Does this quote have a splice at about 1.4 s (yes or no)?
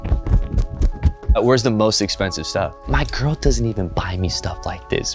yes